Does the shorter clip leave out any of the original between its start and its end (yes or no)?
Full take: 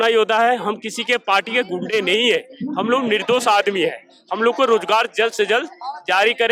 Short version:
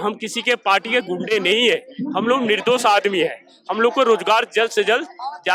no